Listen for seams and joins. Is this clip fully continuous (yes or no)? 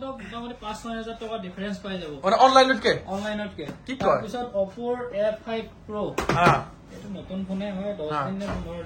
yes